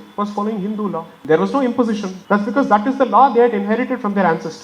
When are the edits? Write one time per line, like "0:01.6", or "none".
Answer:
0:01.1
0:02.1